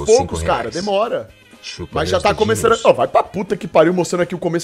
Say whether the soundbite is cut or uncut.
uncut